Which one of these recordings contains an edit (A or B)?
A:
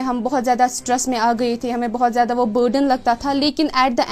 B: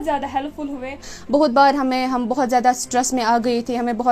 B